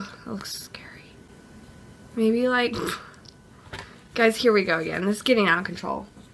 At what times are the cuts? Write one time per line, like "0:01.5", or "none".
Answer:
0:01.3